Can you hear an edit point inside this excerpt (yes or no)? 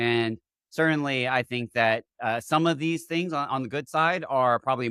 no